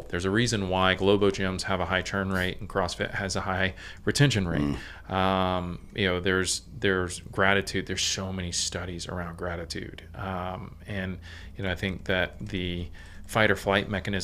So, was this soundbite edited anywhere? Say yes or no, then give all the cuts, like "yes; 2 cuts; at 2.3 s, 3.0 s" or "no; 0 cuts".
no; 0 cuts